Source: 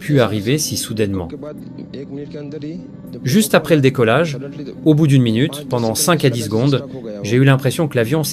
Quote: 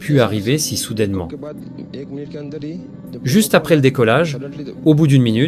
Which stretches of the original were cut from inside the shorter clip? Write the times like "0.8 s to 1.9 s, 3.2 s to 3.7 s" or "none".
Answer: none